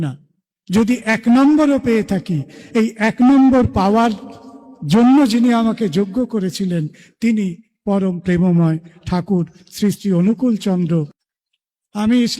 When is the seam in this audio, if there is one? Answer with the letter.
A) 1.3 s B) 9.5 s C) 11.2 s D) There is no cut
C